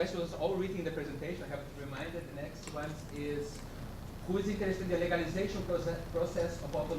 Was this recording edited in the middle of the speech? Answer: yes; 1 cut; at 1.2 s

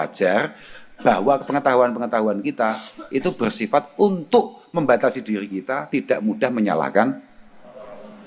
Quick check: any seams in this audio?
no; 0 cuts

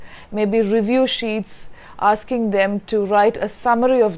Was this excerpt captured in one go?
yes; 0 cuts

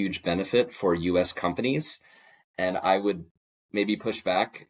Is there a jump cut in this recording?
no; 0 cuts

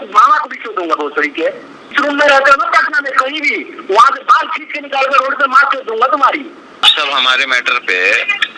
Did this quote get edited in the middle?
yes; 2 cuts; at 1.9 s, 6.8 s

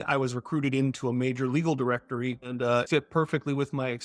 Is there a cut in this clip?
yes; 1 cut; at 2.8 s

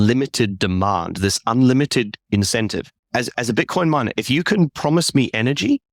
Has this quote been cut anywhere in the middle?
no; 0 cuts

